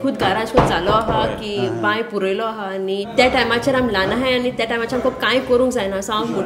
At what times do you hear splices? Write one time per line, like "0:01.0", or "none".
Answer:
0:03.1